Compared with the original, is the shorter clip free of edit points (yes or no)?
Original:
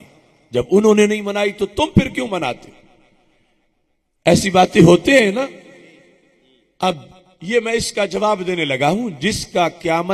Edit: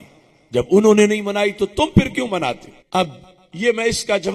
no